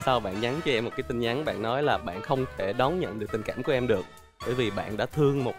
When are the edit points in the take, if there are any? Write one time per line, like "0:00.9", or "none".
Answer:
none